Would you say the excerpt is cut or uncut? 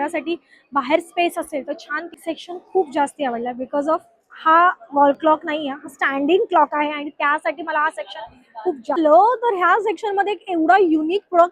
cut